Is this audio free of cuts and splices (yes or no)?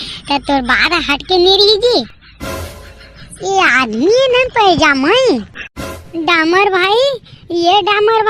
no